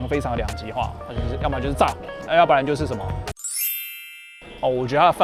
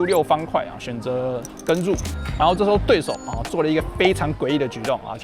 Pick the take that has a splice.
second; 1 cut; at 2.2 s

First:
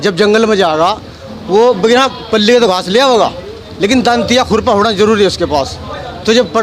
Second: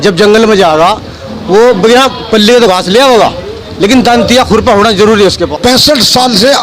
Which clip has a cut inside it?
second; 1 cut; at 5.4 s

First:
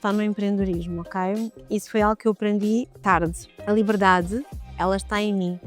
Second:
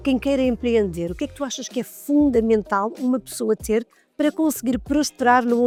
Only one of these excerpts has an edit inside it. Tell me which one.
first; 2 cuts; at 3.5 s, 4.6 s

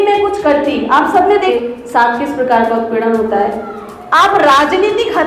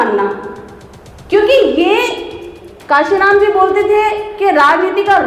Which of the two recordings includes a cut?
first; 1 cut; at 1.5 s

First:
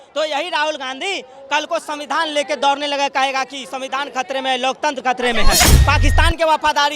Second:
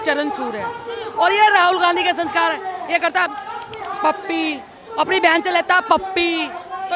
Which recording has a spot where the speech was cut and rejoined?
first; 1 cut; at 5.8 s

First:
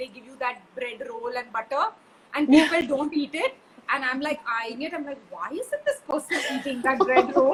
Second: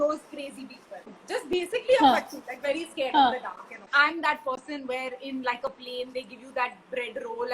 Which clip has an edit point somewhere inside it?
second; 2 cuts; at 1.2 s, 3.9 s

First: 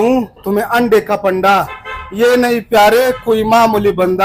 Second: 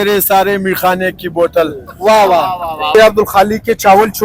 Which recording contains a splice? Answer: second; 1 cut; at 2.9 s

